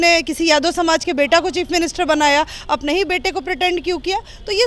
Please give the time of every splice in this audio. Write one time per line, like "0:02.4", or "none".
none